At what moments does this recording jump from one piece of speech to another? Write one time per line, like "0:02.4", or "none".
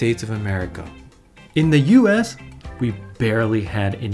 0:01.5